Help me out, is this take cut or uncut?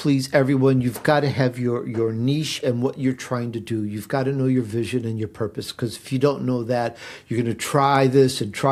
uncut